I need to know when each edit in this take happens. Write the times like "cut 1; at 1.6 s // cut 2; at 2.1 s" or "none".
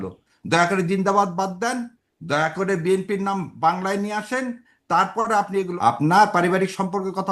cut 1; at 5.7 s